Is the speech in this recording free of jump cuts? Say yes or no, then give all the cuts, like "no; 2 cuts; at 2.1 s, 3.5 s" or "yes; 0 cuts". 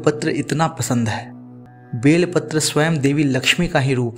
no; 1 cut; at 1.6 s